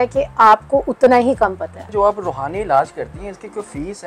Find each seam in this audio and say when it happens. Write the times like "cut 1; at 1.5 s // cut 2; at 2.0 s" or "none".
cut 1; at 1.9 s